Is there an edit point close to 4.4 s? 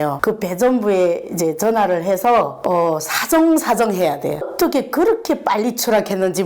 yes; 1 cut; at 4.4 s

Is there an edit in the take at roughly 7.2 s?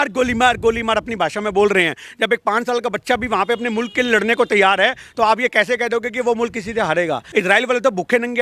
yes; 1 cut; at 7.2 s

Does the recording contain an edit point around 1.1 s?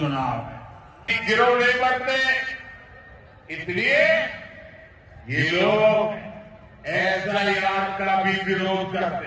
yes; 1 cut; at 1.1 s

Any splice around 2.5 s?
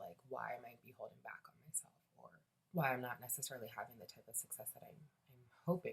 yes; 1 cut; at 2.5 s

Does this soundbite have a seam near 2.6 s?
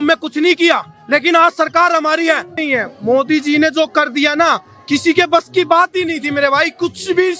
yes; 1 cut; at 2.6 s

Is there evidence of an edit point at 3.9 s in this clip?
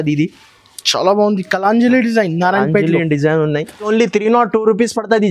yes; 1 cut; at 3.9 s

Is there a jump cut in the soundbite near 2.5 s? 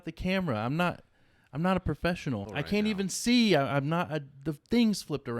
yes; 1 cut; at 2.5 s

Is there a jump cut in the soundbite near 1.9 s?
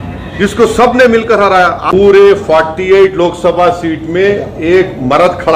yes; 1 cut; at 1.9 s

